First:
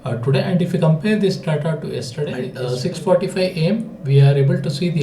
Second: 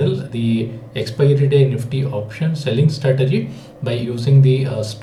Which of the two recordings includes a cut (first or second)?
first